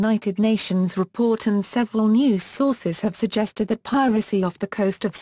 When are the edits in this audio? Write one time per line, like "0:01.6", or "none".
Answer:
none